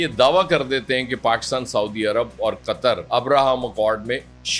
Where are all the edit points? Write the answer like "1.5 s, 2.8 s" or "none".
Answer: none